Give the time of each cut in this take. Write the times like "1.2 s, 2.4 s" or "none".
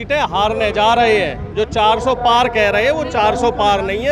none